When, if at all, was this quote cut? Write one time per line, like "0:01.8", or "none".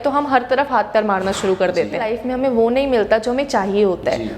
0:02.1